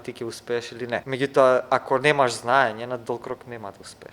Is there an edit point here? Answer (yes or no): yes